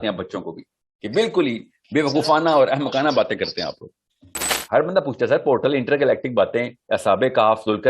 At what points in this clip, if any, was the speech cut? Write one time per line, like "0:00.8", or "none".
0:04.6